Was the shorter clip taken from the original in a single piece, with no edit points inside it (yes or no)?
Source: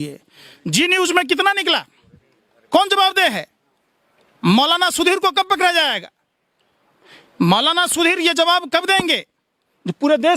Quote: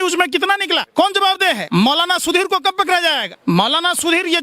no